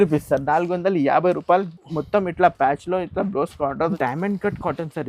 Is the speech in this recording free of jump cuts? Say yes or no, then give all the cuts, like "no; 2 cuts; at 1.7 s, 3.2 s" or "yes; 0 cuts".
no; 1 cut; at 3.9 s